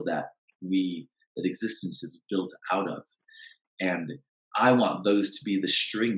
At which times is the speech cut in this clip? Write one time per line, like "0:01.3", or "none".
0:04.3